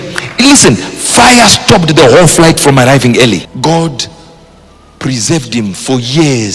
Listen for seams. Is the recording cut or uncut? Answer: cut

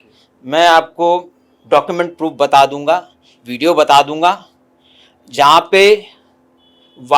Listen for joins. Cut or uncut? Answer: uncut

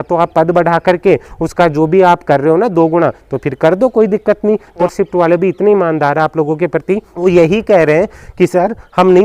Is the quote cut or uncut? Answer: cut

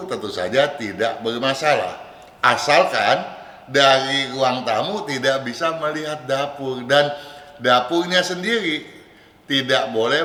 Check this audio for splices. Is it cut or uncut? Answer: uncut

